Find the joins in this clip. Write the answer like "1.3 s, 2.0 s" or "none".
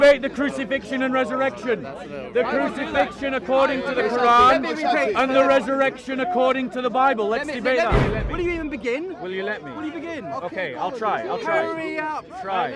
8.0 s